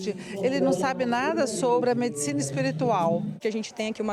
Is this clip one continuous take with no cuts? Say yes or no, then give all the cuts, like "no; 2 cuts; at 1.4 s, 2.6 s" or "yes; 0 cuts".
no; 2 cuts; at 1.8 s, 3.4 s